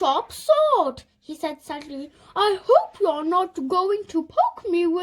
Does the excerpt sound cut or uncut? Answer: uncut